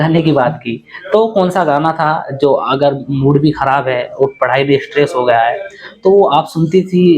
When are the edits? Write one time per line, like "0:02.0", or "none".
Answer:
none